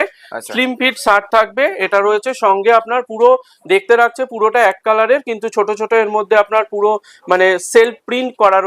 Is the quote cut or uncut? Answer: uncut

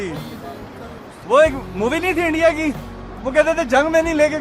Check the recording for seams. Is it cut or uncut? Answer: uncut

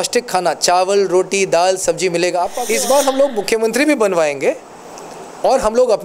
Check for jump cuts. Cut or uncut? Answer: cut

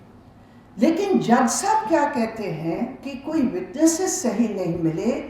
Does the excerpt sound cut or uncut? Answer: cut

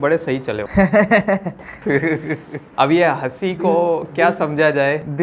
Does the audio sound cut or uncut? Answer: uncut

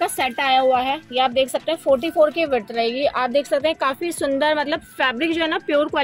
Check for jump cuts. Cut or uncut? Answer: uncut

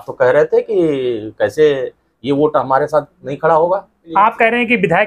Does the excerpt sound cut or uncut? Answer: cut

